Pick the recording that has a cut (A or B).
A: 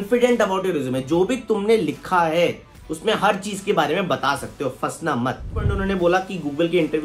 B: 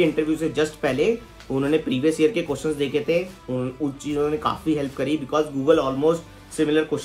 A